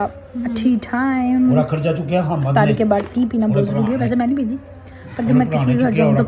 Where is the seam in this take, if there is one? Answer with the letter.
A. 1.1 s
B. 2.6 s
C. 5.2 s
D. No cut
D